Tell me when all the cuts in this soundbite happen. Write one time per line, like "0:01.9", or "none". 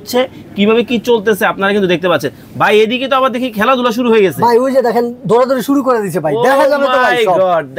none